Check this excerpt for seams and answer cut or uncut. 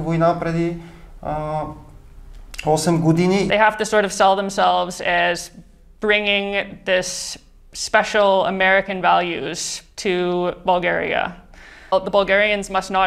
cut